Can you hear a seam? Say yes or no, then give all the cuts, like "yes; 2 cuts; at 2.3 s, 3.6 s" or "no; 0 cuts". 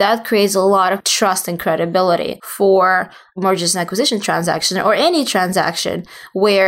yes; 1 cut; at 2.4 s